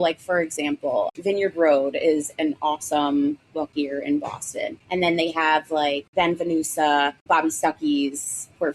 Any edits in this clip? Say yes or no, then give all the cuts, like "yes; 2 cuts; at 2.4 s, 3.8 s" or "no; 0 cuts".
yes; 5 cuts; at 1.1 s, 3.7 s, 4.8 s, 6.0 s, 7.2 s